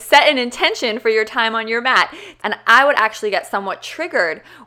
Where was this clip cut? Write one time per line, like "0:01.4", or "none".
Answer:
0:02.2